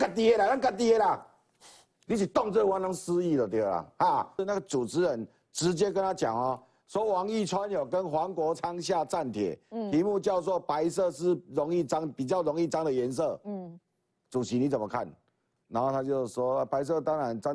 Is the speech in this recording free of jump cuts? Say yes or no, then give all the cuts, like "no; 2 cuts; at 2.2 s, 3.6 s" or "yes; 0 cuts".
no; 1 cut; at 4.4 s